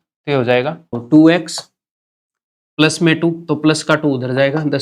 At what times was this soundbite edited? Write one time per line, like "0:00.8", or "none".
0:01.0